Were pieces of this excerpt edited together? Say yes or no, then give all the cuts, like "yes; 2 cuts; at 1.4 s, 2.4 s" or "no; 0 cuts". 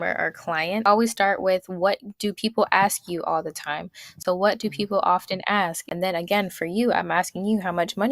yes; 3 cuts; at 0.8 s, 4.2 s, 5.8 s